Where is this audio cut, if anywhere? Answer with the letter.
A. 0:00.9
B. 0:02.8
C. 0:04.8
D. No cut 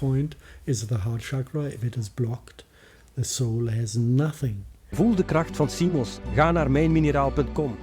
C